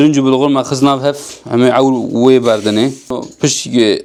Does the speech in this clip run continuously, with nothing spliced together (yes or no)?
yes